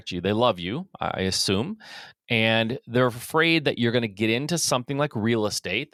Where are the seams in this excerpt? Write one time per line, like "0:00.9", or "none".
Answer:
none